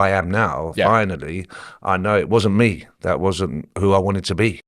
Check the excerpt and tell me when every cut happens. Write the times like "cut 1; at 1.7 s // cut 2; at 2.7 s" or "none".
none